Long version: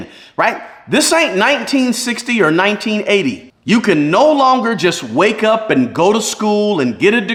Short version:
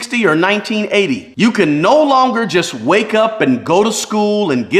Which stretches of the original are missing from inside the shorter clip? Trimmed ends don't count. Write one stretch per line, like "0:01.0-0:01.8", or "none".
0:03.4-0:03.5